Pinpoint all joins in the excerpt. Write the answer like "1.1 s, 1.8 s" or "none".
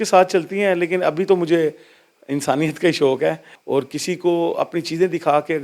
3.5 s